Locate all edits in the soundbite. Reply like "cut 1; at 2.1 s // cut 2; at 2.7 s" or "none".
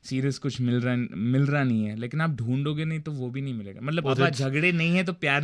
cut 1; at 4.3 s